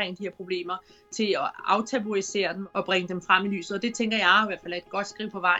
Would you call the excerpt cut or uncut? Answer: cut